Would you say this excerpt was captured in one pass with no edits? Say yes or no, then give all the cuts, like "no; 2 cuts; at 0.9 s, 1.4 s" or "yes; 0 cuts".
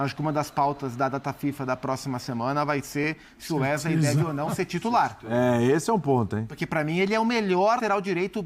yes; 0 cuts